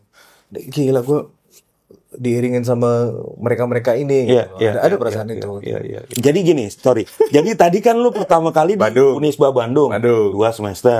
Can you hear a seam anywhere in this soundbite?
yes; 1 cut; at 6.1 s

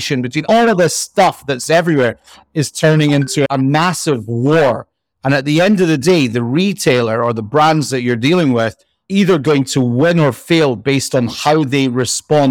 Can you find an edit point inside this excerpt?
no; 0 cuts

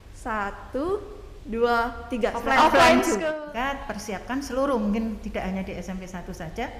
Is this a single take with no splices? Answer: no; 1 cut; at 3.2 s

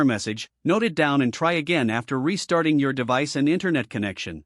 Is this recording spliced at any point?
no; 0 cuts

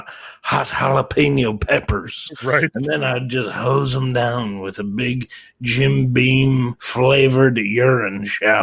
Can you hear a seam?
yes; 1 cut; at 6.8 s

